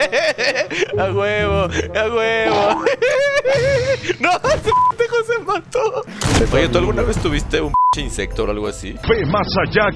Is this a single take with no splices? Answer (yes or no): no